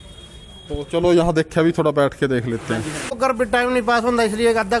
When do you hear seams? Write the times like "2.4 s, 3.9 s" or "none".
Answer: 3.2 s